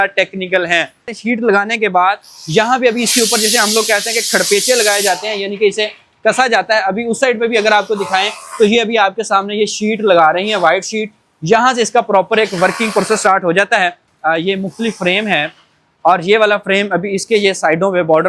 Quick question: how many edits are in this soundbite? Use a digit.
2